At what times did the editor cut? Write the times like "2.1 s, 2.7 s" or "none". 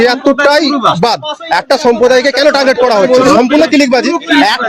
3.3 s